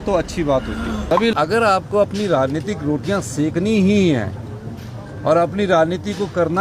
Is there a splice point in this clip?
yes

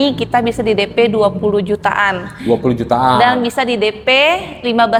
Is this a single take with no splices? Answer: yes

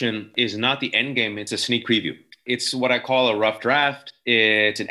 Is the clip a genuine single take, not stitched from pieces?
yes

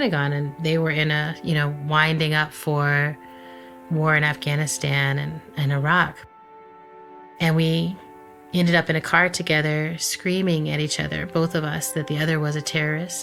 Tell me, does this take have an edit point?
no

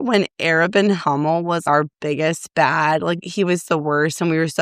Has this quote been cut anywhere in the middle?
yes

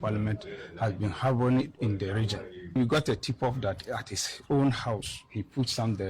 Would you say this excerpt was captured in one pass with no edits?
no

